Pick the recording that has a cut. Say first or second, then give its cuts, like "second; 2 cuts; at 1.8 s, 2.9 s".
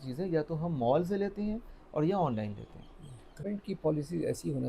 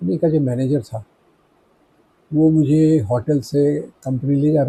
first; 1 cut; at 3.4 s